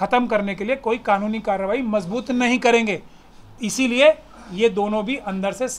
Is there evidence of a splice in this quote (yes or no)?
no